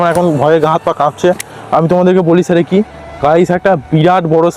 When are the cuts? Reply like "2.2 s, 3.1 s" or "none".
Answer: none